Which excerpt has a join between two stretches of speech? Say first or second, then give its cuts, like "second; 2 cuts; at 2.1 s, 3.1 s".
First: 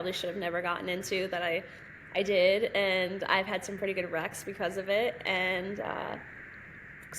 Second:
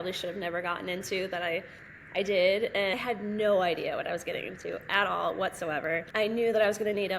second; 2 cuts; at 2.9 s, 6.1 s